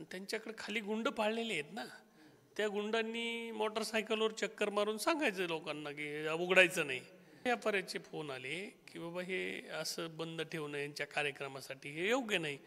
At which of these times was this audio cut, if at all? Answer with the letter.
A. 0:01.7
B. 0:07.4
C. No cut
B